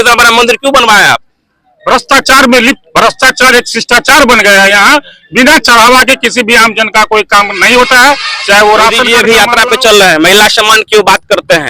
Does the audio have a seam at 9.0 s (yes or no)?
yes